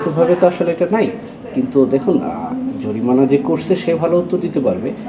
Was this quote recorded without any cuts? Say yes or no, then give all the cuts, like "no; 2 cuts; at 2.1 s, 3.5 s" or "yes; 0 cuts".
yes; 0 cuts